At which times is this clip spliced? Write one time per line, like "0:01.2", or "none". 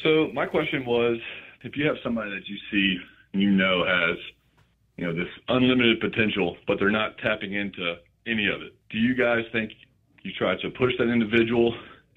0:01.5
0:08.8